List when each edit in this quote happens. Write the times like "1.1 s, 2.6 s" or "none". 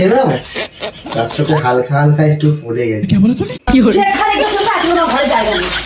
3.5 s